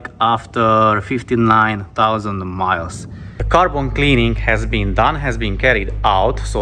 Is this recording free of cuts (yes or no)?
no